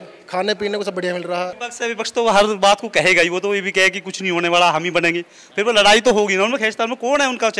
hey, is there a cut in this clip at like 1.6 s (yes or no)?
yes